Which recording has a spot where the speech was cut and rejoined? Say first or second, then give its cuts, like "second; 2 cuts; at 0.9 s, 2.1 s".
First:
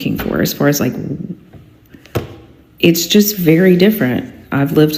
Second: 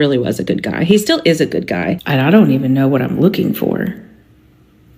second; 1 cut; at 2.0 s